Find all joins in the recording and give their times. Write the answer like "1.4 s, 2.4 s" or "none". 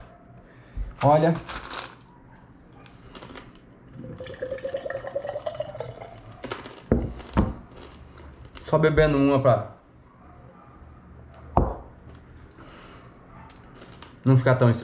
none

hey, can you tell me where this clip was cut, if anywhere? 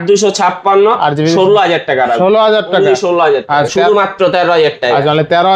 3.7 s

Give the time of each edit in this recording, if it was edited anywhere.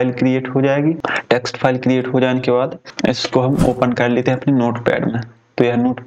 1.0 s, 2.8 s

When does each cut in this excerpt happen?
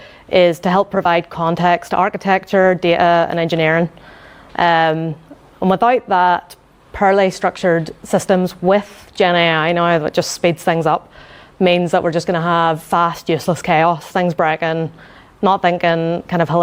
none

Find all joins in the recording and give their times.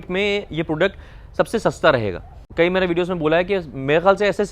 2.4 s

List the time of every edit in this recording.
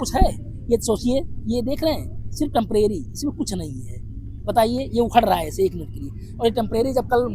none

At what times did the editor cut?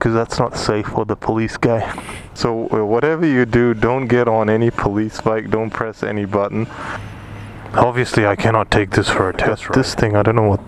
2.4 s, 7.3 s, 9.6 s

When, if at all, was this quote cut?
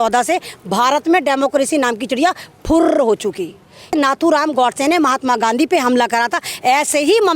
3.9 s

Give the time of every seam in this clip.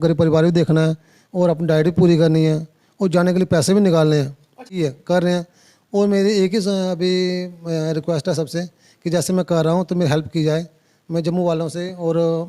4.8 s

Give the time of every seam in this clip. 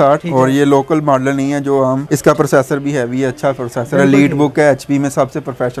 none

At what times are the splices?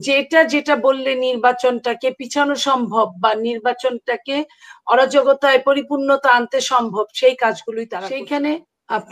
7.9 s

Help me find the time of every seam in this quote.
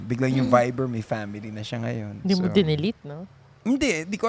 2.3 s

